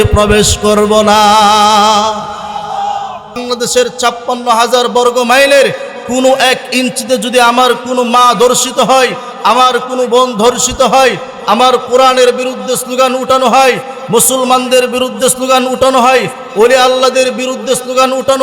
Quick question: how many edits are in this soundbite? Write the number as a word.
one